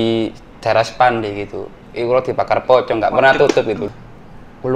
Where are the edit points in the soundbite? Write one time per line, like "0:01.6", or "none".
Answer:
0:03.8